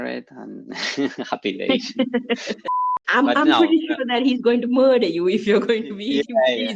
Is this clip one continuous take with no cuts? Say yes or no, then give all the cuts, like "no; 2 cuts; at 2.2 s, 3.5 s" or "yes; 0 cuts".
no; 1 cut; at 2.6 s